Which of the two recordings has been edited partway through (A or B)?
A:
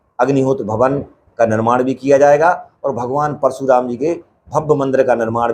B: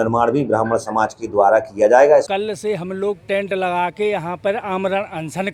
B